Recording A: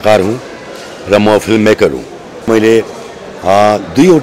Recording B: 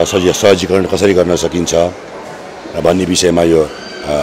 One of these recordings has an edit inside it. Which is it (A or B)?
A